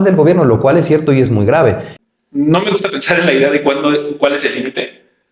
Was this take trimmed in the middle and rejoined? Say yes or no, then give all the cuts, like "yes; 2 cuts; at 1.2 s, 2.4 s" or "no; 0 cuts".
yes; 1 cut; at 1.9 s